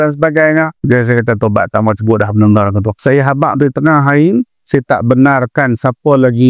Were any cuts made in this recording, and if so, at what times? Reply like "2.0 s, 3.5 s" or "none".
2.9 s